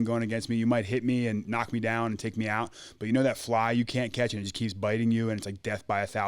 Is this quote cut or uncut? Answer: cut